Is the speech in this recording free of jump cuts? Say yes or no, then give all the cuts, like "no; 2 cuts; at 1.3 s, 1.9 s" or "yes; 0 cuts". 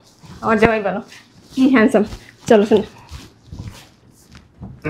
yes; 0 cuts